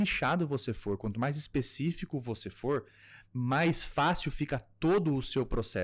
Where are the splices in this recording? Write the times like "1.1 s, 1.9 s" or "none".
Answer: none